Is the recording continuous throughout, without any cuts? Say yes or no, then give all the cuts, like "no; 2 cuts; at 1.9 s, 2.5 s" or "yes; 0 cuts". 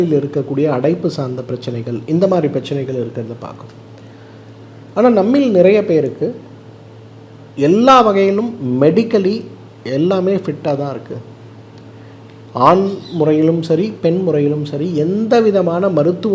yes; 0 cuts